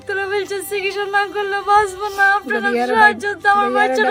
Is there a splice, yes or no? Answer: no